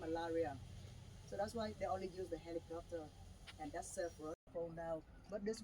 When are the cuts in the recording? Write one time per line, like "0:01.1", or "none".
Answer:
0:04.4

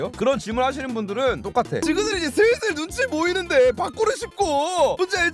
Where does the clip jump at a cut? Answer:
0:01.8

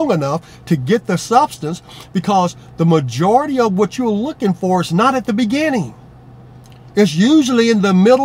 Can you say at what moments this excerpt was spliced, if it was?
none

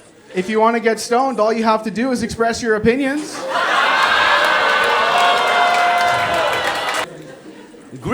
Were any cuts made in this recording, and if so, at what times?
0:07.1

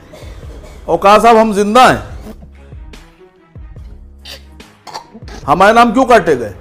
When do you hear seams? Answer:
none

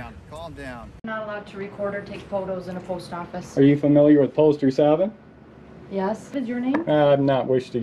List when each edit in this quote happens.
0:01.0
0:06.3

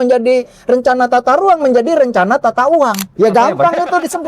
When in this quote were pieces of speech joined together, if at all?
0:03.1

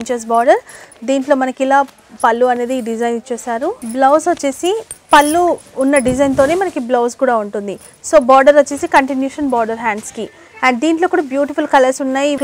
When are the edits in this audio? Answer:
none

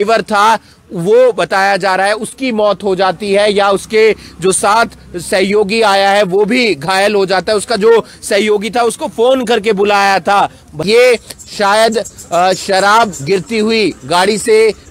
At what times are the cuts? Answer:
0:10.8

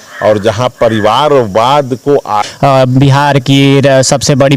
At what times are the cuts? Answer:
0:02.3

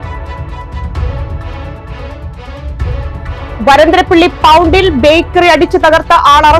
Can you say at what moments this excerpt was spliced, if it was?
0:03.0

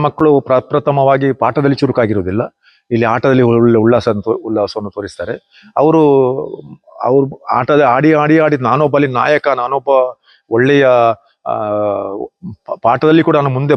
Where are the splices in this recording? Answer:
none

